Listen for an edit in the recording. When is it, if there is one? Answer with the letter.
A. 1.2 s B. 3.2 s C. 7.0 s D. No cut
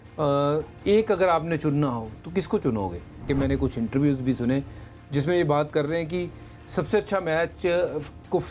B